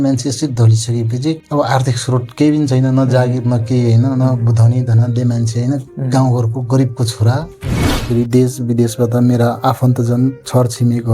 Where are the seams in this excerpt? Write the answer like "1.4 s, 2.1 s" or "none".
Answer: 1.4 s, 7.9 s

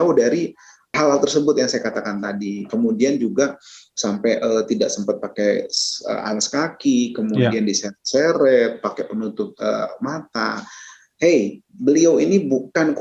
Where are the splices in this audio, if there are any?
0.9 s

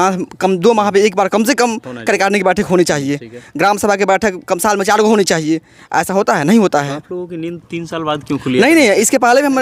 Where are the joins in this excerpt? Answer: none

